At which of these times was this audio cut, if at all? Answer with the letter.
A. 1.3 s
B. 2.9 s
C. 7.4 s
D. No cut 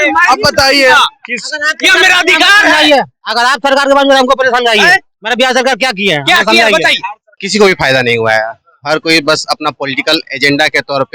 C